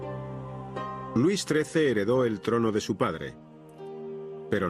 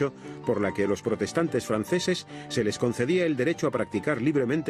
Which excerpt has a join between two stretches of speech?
second; 1 cut; at 3.4 s

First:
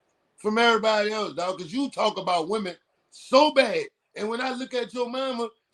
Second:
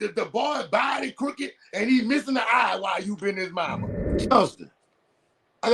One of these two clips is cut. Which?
second; 1 cut; at 3.9 s

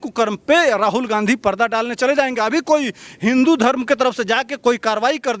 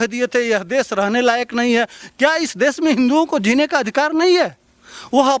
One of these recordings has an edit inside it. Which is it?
second; 1 cut; at 2.0 s

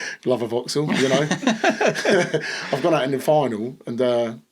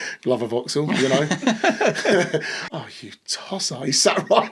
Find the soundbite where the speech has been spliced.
second; 1 cut; at 2.5 s

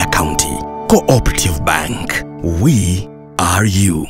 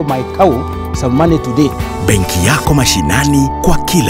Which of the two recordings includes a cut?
second; 1 cut; at 1.8 s

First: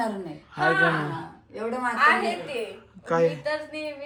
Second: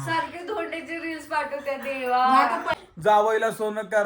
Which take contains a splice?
second; 1 cut; at 2.7 s

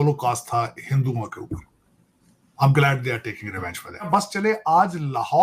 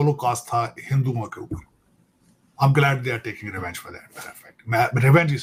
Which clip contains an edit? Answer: first; 1 cut; at 4.0 s

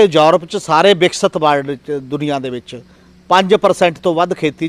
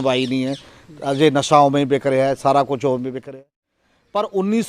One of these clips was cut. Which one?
second; 1 cut; at 3.2 s

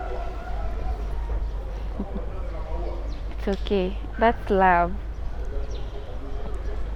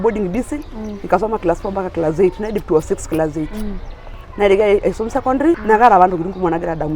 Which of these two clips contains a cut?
second; 1 cut; at 5.6 s

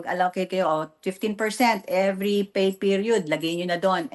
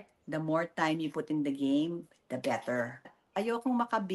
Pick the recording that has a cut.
second; 1 cut; at 3.2 s

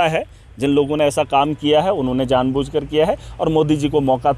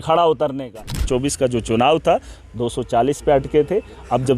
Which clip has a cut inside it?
second; 1 cut; at 1.1 s

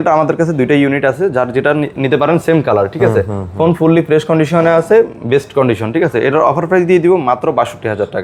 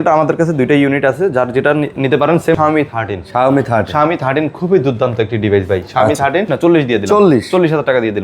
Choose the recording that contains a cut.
second; 2 cuts; at 2.5 s, 6.5 s

